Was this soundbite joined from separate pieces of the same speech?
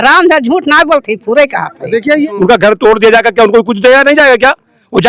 yes; 1 cut; at 2.1 s

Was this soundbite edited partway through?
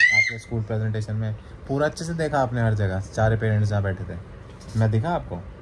no; 0 cuts

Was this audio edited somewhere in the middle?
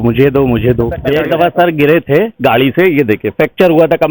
yes; 1 cut; at 0.9 s

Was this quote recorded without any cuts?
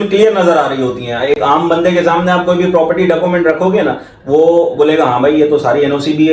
yes; 0 cuts

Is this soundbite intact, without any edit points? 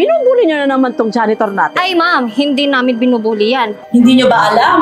no; 1 cut; at 3.8 s

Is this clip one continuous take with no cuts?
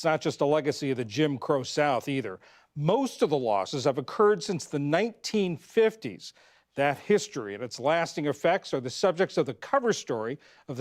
no; 2 cuts; at 1.8 s, 4.4 s

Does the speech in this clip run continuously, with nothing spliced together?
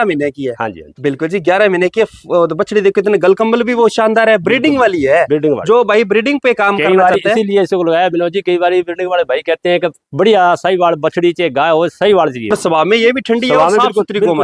no; 1 cut; at 12.5 s

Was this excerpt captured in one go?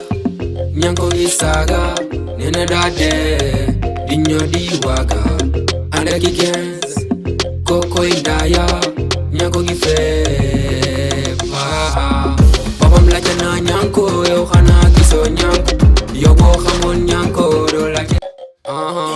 no; 1 cut; at 18.2 s

